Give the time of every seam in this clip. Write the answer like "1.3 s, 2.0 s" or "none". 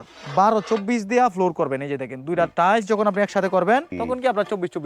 3.9 s